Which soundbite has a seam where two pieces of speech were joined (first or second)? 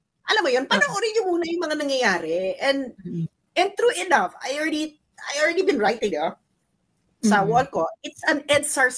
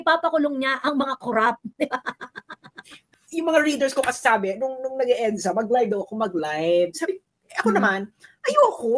second